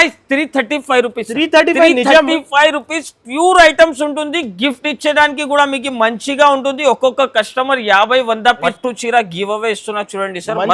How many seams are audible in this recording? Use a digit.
1